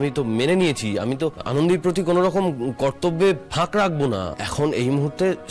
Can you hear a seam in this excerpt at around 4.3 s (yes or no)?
yes